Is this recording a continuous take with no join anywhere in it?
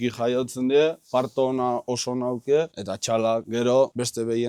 yes; 0 cuts

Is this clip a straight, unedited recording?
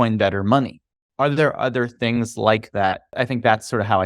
no; 2 cuts; at 0.9 s, 3.1 s

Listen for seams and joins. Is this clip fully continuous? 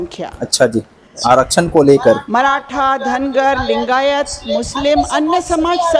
no; 1 cut; at 1.1 s

